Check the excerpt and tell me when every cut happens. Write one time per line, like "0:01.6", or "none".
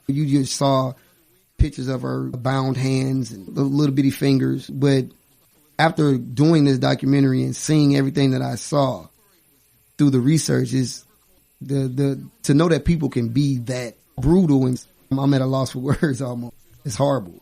0:14.2